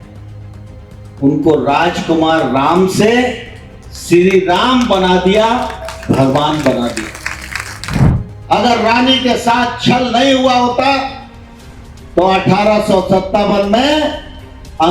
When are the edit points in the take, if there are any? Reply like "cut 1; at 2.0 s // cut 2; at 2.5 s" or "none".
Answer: cut 1; at 8.0 s